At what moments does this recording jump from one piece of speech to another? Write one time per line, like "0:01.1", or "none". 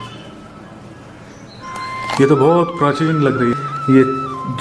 0:03.6